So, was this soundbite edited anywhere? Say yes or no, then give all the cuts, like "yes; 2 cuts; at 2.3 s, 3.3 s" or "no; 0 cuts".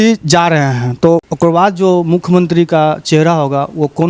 yes; 1 cut; at 1.3 s